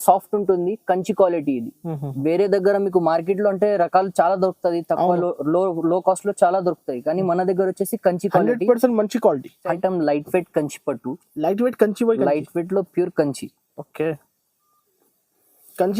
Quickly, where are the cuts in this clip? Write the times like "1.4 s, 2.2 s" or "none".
9.6 s